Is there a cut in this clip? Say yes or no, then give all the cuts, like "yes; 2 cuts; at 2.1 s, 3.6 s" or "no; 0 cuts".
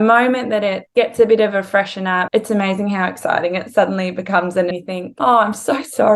yes; 2 cuts; at 2.3 s, 4.8 s